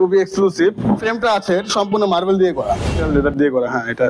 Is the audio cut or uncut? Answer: cut